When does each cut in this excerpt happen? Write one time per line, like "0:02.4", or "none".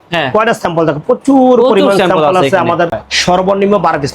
0:03.1